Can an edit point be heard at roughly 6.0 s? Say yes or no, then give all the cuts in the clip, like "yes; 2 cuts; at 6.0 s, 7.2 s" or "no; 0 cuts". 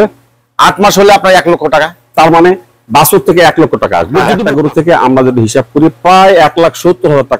no; 1 cut; at 4.3 s